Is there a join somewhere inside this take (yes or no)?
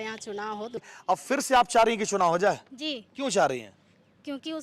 yes